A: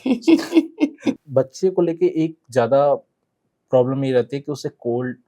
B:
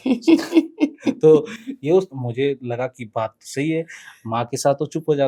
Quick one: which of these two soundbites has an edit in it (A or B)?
A